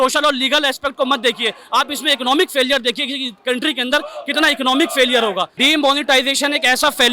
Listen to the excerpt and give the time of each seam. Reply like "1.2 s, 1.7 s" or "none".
5.5 s